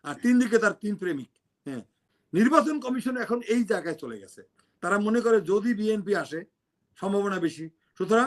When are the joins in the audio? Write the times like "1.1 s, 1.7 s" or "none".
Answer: 2.0 s